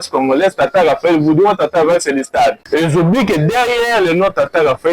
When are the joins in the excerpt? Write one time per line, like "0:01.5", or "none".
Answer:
0:02.6